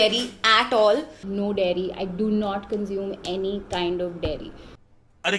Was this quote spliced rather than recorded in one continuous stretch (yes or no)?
no